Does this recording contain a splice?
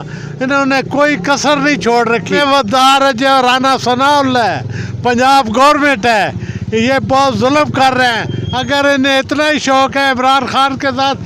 yes; 1 cut; at 2.4 s

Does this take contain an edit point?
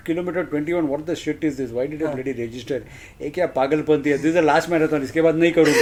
no; 0 cuts

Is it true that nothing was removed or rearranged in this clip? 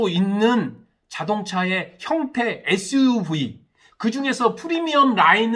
yes; 0 cuts

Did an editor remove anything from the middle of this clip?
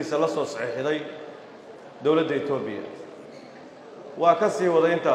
no; 0 cuts

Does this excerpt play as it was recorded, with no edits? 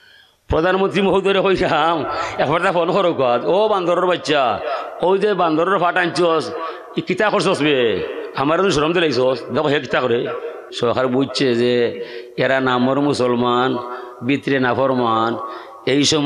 no; 1 cut; at 10.7 s

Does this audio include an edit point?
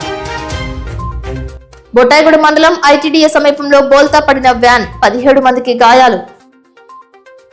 yes; 1 cut; at 1.4 s

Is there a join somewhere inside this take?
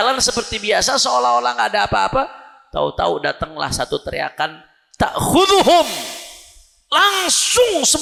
no; 0 cuts

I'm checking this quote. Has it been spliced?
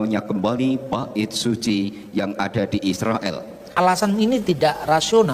yes; 1 cut; at 3.7 s

